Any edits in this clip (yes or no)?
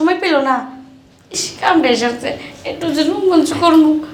no